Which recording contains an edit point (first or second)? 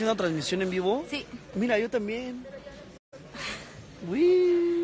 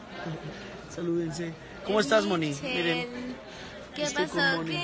second